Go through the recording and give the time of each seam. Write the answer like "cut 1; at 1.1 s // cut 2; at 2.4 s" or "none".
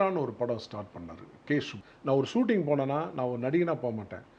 cut 1; at 1.8 s